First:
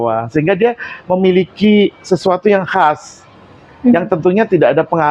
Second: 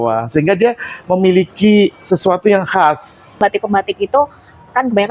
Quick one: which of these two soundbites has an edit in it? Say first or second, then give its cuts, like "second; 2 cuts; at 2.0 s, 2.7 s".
second; 1 cut; at 3.4 s